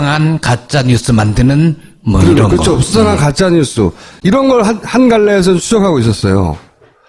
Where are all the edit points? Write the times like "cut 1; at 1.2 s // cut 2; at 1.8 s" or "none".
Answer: cut 1; at 1.0 s